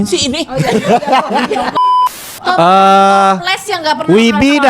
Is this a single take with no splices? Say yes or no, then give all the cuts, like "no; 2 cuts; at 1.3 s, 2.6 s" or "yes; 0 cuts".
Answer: no; 1 cut; at 2.2 s